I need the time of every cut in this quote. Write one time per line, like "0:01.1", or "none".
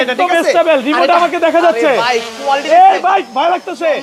none